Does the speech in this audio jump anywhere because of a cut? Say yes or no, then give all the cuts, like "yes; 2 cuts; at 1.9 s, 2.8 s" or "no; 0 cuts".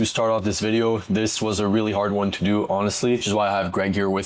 no; 0 cuts